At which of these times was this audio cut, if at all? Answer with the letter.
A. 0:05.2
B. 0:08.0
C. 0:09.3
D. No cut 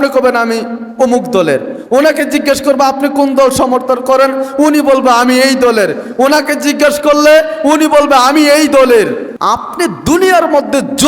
C